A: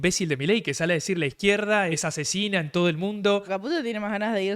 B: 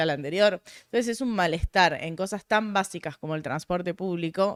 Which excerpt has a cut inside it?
A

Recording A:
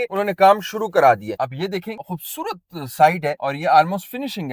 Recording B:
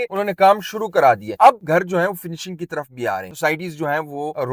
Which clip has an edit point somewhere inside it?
A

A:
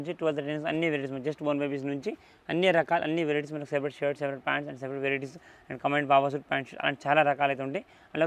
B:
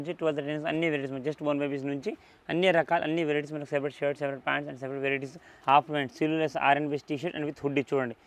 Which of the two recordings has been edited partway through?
B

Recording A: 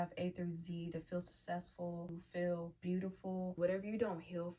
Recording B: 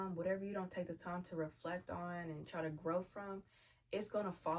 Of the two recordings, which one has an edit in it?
A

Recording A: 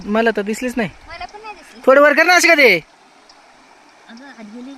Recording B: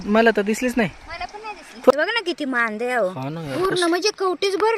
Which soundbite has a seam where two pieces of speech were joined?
B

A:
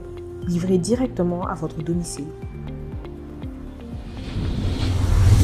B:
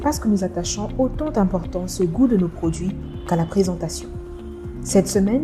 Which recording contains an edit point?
A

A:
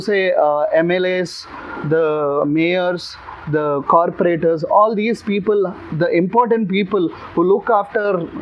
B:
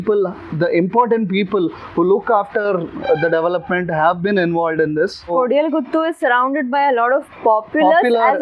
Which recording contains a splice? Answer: B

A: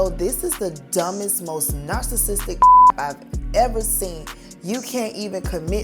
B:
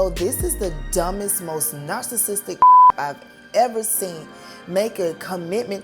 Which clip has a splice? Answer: A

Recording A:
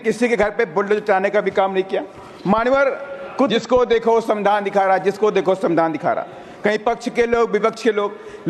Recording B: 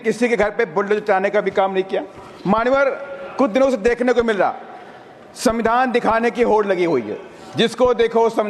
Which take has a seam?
A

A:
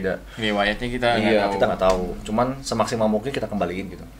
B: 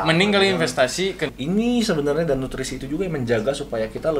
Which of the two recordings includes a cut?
B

